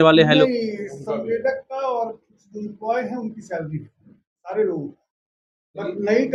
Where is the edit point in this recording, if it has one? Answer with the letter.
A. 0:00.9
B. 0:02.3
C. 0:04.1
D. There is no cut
D